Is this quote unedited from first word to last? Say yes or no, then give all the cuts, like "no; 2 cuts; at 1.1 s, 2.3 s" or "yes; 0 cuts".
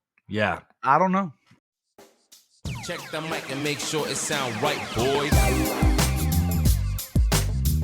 no; 1 cut; at 1.4 s